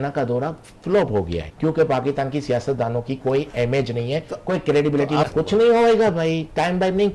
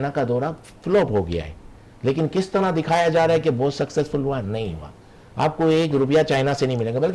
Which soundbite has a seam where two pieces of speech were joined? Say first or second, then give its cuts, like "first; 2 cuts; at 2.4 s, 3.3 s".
first; 2 cuts; at 1.4 s, 5.2 s